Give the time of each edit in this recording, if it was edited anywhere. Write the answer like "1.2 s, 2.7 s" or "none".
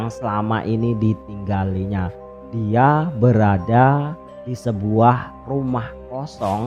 none